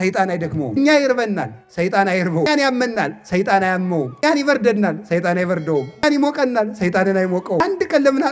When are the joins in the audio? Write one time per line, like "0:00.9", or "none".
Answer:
0:00.8
0:02.5
0:04.2
0:06.0
0:07.6